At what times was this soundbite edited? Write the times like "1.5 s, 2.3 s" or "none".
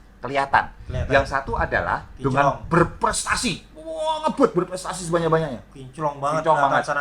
none